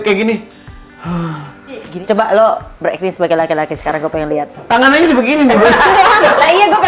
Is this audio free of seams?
no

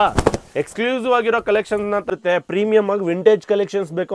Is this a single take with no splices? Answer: no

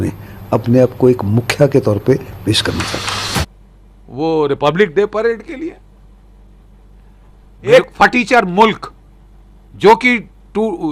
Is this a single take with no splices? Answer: yes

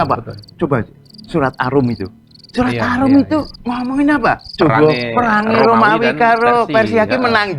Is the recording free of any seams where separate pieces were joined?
no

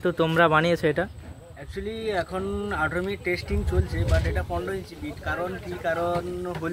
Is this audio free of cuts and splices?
yes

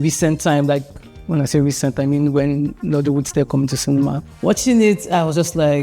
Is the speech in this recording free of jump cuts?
no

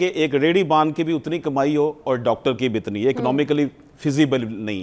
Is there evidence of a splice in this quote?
no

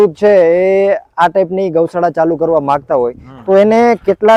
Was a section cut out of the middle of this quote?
no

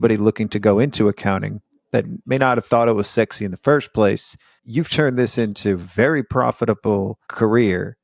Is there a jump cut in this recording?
yes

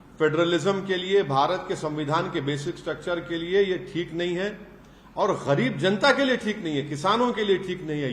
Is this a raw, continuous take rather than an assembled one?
yes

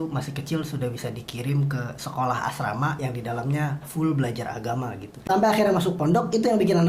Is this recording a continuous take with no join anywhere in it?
no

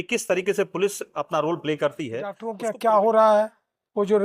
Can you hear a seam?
yes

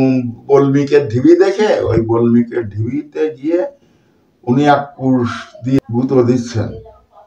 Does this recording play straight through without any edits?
no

